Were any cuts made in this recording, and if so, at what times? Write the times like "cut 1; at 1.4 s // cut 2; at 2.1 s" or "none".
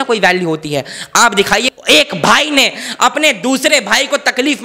cut 1; at 1.6 s